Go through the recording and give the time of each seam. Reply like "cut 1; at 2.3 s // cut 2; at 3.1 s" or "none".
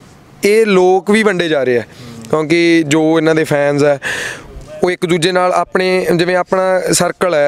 none

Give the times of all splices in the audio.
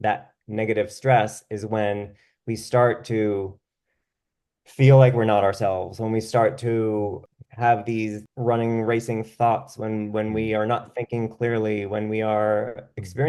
cut 1; at 7.2 s // cut 2; at 8.2 s

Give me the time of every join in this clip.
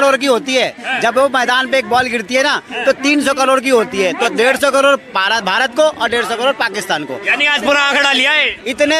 none

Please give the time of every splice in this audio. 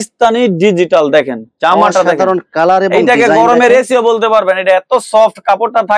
none

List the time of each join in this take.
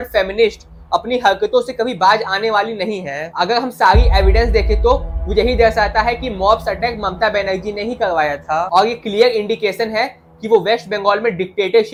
none

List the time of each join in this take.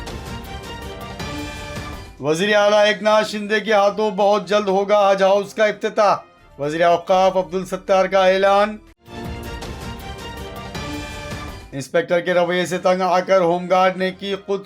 cut 1; at 2.0 s

